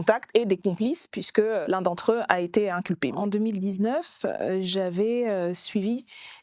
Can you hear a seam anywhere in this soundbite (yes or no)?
yes